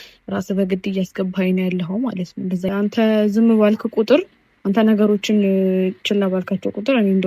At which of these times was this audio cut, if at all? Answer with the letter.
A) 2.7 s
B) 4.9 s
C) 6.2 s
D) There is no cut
A